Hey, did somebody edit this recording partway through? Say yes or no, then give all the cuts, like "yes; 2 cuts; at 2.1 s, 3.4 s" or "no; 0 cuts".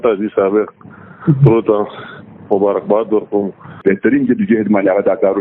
yes; 1 cut; at 3.6 s